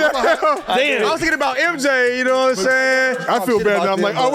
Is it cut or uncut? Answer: cut